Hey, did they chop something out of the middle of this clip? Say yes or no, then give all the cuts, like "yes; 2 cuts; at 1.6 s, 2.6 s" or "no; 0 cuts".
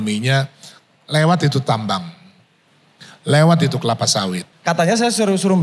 yes; 1 cut; at 4.5 s